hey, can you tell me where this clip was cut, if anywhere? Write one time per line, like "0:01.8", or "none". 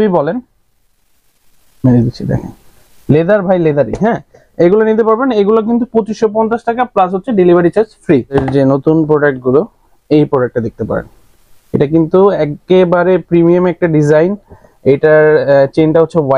none